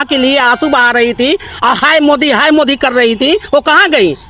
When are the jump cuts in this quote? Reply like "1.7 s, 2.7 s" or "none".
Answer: none